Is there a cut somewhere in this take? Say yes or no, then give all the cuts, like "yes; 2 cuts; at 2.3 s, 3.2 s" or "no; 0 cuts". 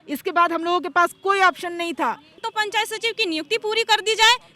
yes; 1 cut; at 2.4 s